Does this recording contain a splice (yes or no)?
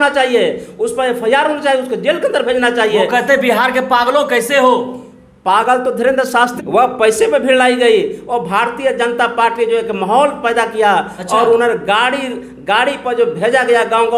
yes